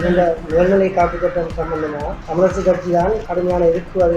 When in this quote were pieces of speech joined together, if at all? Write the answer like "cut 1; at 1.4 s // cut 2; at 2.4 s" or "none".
cut 1; at 2.2 s // cut 2; at 3.3 s